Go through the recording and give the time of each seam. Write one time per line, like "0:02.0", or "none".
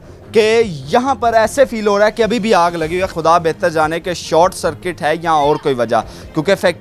0:03.1